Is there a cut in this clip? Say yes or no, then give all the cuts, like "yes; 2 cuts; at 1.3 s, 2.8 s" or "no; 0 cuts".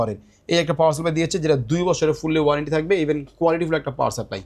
no; 0 cuts